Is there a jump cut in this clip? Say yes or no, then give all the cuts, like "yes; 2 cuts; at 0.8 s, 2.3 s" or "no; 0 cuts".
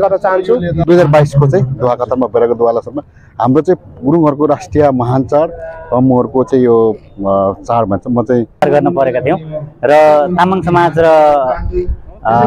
yes; 2 cuts; at 0.8 s, 8.6 s